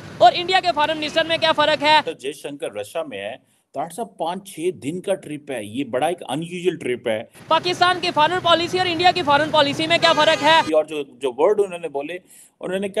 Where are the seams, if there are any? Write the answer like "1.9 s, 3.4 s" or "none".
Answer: 2.1 s, 7.4 s, 10.6 s